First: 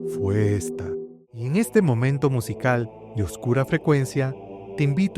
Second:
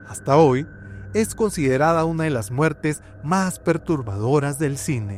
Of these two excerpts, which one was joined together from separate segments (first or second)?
first